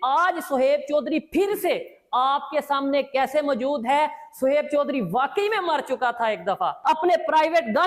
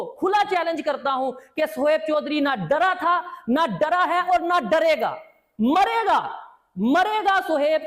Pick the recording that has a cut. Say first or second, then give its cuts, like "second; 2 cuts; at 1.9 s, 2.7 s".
first; 1 cut; at 6.8 s